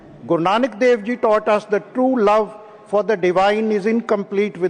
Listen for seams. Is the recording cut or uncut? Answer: uncut